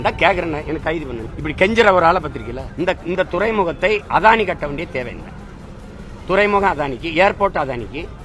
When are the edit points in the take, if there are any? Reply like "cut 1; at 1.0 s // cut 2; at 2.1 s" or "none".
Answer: cut 1; at 1.3 s // cut 2; at 2.6 s